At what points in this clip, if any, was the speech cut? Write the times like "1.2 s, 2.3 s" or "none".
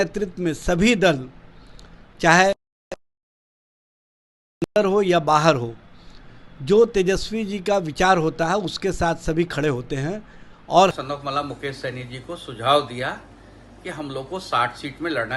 10.9 s